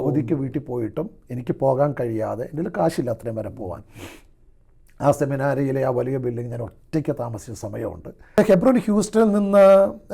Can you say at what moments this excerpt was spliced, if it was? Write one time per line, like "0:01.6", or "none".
0:08.4